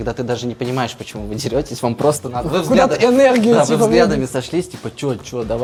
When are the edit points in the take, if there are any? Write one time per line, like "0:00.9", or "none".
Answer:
none